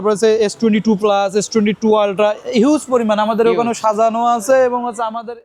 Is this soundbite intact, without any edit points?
yes; 0 cuts

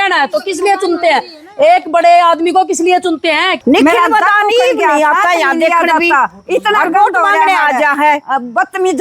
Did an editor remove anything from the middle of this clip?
yes; 1 cut; at 3.5 s

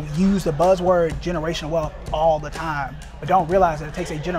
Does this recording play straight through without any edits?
yes; 0 cuts

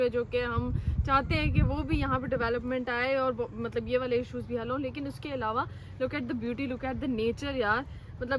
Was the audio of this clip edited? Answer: no; 0 cuts

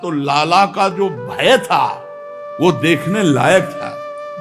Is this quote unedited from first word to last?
yes; 0 cuts

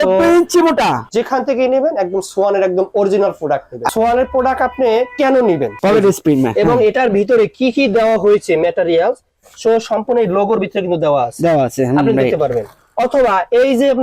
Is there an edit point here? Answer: yes; 3 cuts; at 1.0 s, 3.9 s, 5.7 s

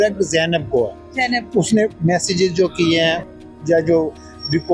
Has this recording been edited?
no; 0 cuts

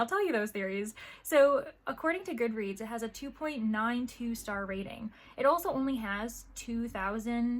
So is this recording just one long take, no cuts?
yes; 0 cuts

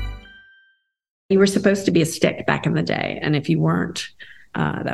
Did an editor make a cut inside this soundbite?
yes; 1 cut; at 1.3 s

